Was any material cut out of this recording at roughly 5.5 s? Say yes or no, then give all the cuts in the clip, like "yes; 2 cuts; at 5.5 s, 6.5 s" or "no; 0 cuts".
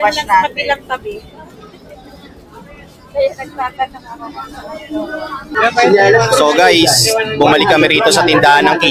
yes; 1 cut; at 5.5 s